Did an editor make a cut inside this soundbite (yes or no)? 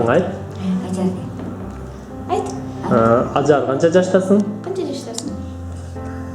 yes